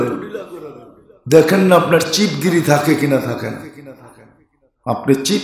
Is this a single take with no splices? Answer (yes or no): yes